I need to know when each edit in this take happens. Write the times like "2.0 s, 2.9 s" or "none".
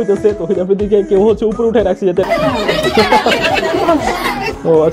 2.3 s

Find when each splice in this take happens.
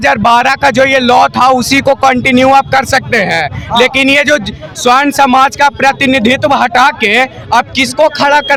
none

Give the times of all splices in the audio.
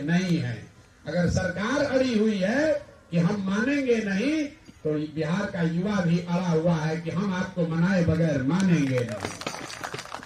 none

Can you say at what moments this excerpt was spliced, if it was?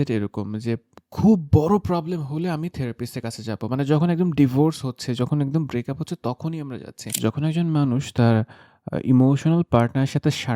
7.0 s

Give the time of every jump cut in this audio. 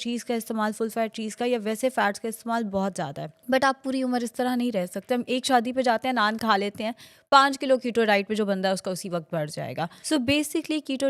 none

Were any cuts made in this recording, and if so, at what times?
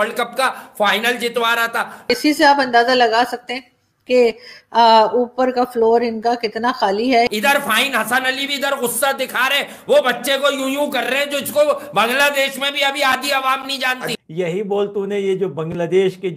2.1 s, 7.3 s, 14.1 s

